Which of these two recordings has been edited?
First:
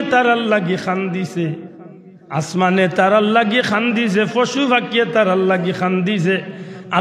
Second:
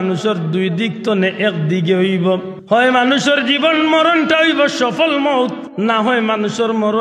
second; 2 cuts; at 2.5 s, 5.6 s

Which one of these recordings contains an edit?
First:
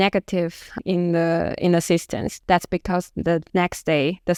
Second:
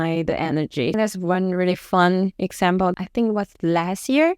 second; 2 cuts; at 0.9 s, 2.8 s

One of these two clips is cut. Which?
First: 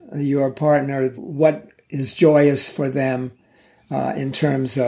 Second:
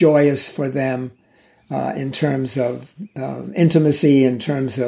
first; 1 cut; at 1.1 s

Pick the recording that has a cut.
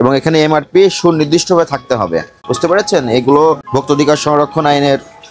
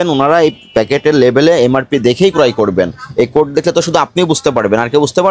first; 2 cuts; at 2.4 s, 3.6 s

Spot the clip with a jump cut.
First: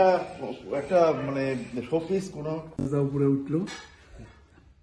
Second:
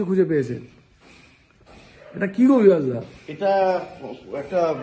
first; 1 cut; at 2.7 s

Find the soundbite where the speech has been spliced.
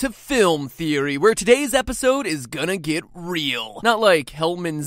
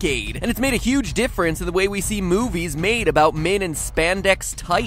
second; 1 cut; at 1.3 s

